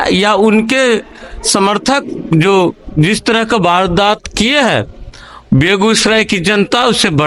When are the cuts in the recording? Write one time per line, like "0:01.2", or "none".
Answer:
none